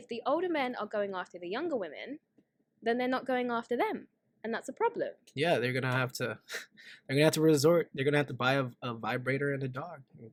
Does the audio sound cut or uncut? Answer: uncut